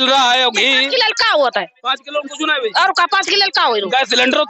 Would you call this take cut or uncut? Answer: uncut